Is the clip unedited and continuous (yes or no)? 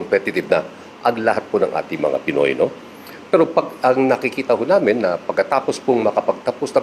yes